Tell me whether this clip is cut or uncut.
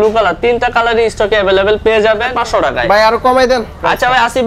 cut